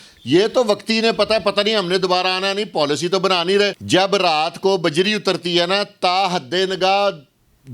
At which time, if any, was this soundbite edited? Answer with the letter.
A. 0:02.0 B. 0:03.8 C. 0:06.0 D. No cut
B